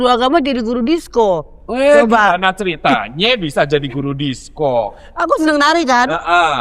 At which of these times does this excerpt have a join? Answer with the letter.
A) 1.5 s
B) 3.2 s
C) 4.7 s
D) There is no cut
D